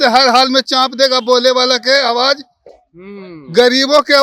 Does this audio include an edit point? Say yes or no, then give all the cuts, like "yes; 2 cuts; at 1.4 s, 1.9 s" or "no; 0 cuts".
no; 0 cuts